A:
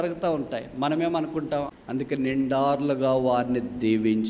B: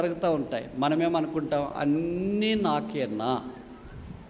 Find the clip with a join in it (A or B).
A